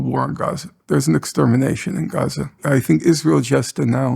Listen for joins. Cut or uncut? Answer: cut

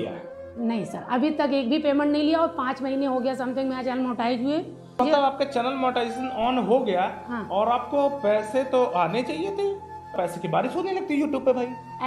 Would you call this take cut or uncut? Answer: cut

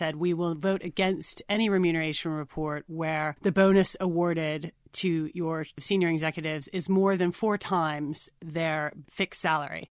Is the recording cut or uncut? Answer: cut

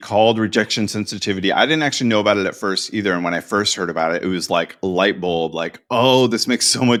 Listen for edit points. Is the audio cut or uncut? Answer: uncut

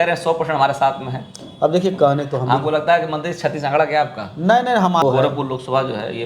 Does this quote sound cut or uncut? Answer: cut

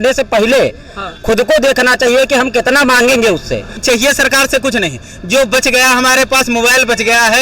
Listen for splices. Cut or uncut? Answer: cut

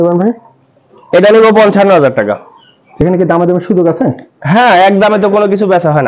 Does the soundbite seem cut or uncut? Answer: uncut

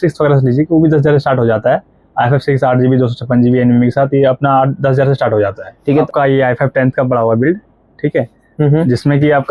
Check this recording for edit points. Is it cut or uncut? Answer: cut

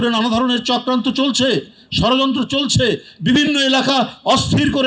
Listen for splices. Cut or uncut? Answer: uncut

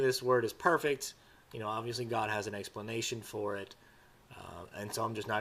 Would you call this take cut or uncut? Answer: uncut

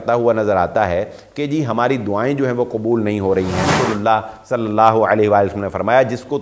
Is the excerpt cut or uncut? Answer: cut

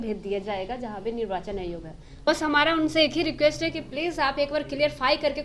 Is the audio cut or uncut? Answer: cut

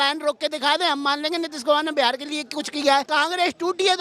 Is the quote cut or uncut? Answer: cut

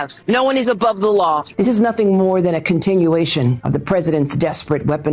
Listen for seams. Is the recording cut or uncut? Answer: cut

